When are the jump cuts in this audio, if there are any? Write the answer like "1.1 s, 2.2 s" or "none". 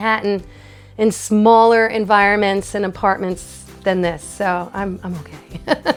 none